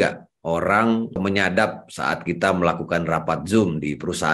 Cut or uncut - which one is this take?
cut